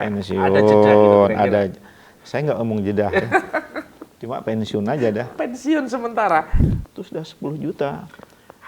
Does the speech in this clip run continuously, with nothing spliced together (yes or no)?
no